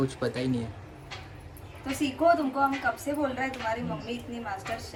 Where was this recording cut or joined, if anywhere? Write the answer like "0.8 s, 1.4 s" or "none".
none